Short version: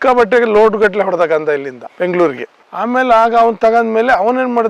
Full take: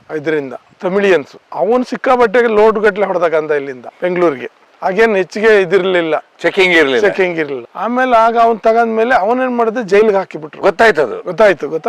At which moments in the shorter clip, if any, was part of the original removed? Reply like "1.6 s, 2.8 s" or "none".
2.6 s